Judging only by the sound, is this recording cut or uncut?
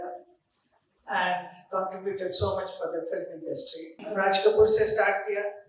cut